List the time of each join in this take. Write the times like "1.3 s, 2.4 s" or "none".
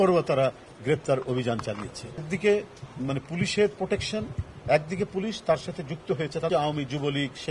2.3 s, 6.5 s